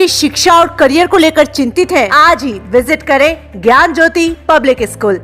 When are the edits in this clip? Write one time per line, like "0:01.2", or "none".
0:02.1